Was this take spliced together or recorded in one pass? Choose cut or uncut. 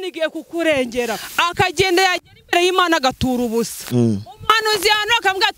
cut